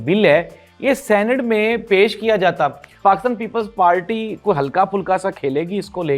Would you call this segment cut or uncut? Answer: cut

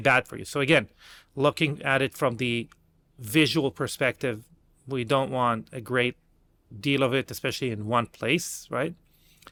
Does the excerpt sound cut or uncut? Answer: uncut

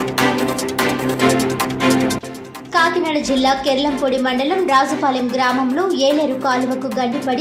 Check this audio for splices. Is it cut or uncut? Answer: uncut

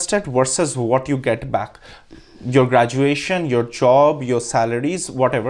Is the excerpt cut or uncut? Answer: uncut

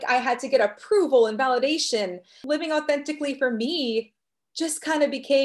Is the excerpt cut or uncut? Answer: uncut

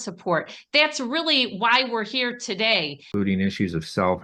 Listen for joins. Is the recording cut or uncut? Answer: cut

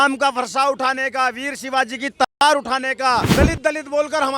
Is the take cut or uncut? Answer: cut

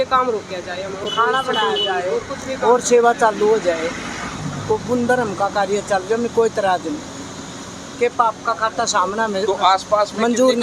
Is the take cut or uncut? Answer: uncut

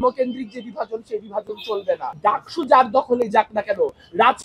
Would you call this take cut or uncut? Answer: cut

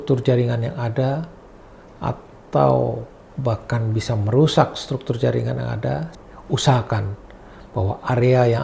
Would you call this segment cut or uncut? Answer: cut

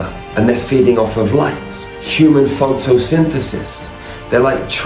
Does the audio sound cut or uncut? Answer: uncut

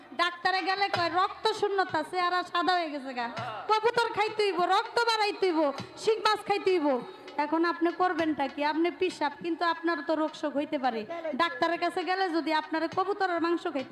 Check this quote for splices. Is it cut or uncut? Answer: uncut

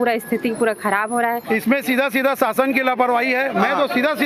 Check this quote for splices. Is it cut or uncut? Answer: cut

